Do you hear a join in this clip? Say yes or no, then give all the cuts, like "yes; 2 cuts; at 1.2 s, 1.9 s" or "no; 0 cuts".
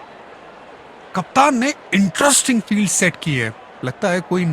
yes; 1 cut; at 1.0 s